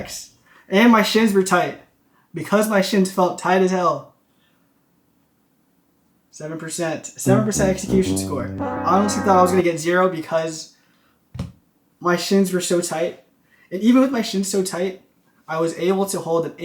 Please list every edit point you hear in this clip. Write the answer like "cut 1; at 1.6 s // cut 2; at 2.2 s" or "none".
none